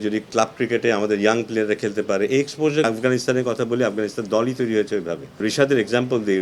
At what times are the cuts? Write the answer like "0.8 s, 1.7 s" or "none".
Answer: 2.8 s, 5.4 s